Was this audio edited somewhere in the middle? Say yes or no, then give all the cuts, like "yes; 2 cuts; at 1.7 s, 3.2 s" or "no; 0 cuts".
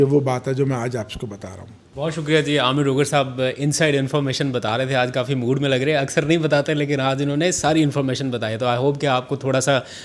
no; 0 cuts